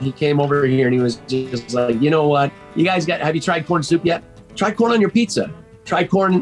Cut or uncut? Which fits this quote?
cut